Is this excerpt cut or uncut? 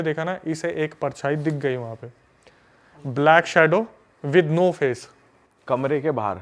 uncut